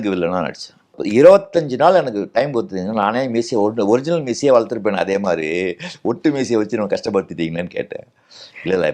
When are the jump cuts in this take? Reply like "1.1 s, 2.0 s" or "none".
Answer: 1.0 s